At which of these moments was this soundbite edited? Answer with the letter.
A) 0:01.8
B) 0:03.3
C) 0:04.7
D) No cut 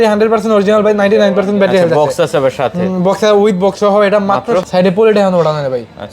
C